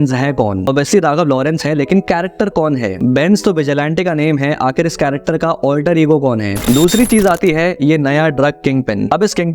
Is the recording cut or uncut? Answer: cut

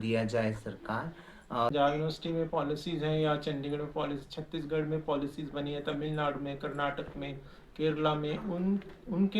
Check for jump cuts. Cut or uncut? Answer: cut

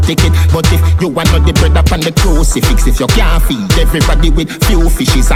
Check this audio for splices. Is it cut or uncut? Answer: uncut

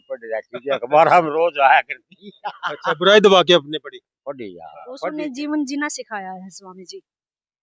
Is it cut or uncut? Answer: cut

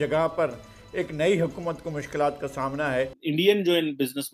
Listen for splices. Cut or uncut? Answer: cut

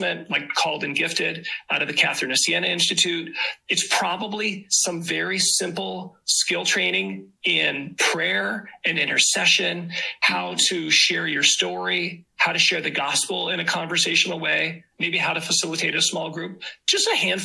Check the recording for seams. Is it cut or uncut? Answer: uncut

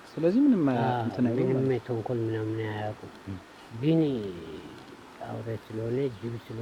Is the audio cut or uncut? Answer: uncut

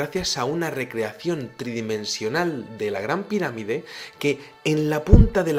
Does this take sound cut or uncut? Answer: uncut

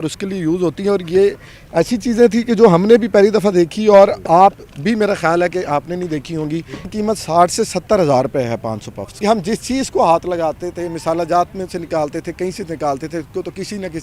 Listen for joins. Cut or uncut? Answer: cut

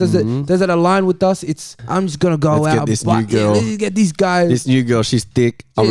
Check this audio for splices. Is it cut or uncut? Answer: cut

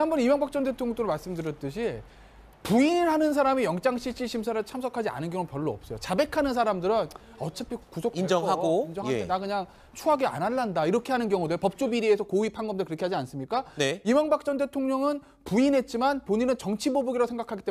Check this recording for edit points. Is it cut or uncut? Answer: cut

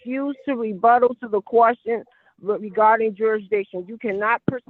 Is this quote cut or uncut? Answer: uncut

